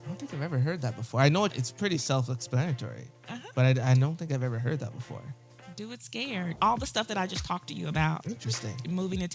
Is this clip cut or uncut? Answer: cut